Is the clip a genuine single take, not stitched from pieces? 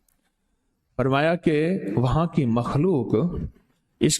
yes; 0 cuts

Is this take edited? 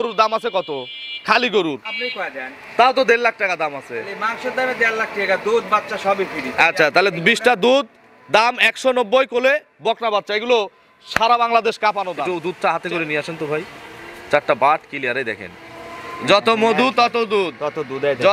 yes; 1 cut; at 12.3 s

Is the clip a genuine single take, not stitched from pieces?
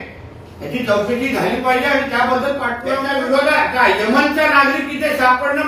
no; 1 cut; at 3.1 s

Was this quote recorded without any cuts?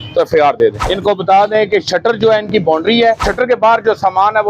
no; 2 cuts; at 0.8 s, 3.3 s

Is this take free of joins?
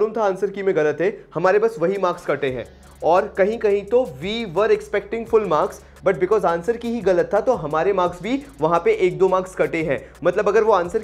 yes; 0 cuts

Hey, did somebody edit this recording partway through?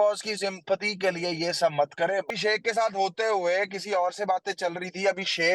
yes; 1 cut; at 2.3 s

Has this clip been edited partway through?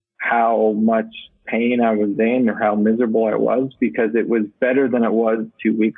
no; 0 cuts

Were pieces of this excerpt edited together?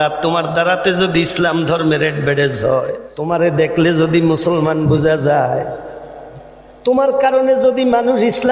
yes; 1 cut; at 3.1 s

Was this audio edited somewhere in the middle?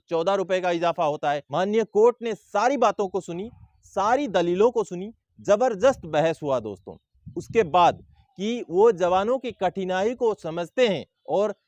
yes; 2 cuts; at 1.5 s, 8.1 s

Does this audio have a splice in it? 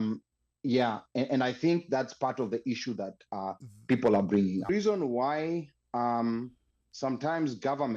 yes; 1 cut; at 4.7 s

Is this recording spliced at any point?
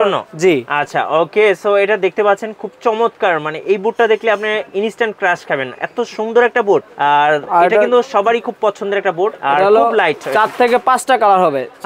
yes; 1 cut; at 6.9 s

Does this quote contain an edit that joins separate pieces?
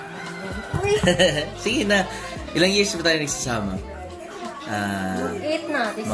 no; 0 cuts

